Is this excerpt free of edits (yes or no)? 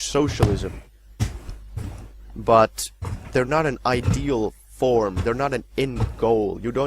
no